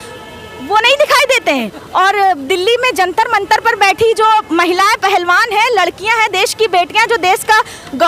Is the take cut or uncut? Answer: uncut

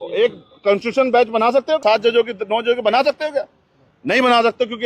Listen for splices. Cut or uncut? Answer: cut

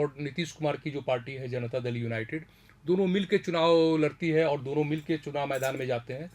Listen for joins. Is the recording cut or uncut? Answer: uncut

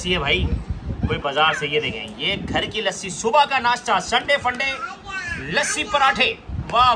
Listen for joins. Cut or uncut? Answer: uncut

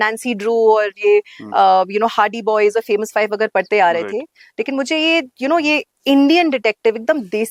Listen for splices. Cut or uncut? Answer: uncut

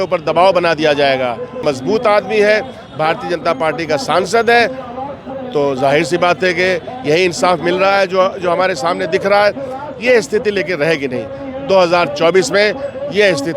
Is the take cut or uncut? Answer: cut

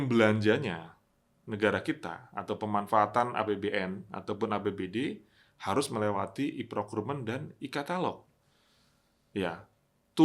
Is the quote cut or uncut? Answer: uncut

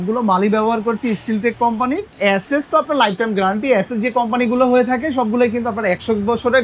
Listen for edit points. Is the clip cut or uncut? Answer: cut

